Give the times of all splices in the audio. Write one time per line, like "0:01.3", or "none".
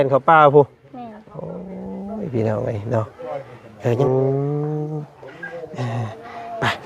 0:04.0